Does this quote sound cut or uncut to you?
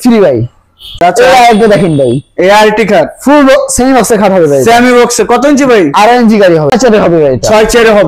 cut